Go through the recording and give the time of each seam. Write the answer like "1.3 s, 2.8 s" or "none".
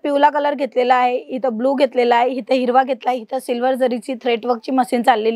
none